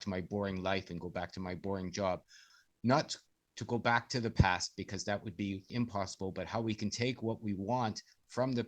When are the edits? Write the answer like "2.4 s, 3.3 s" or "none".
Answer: 2.5 s, 5.7 s